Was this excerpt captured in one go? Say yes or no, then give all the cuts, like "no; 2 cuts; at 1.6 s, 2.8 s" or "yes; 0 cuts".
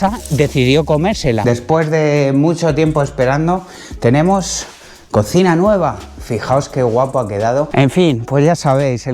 no; 2 cuts; at 1.4 s, 7.7 s